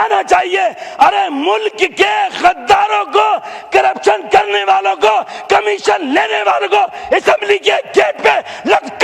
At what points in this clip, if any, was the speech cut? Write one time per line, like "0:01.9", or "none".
none